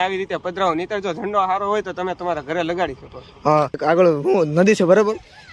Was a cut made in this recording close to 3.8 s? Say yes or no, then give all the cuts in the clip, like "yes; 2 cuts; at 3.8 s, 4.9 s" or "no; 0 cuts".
yes; 1 cut; at 3.8 s